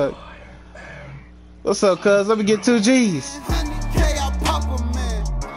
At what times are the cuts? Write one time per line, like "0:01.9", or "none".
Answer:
0:03.4